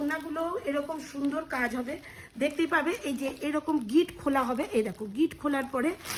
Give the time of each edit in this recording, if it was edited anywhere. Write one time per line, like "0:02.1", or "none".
none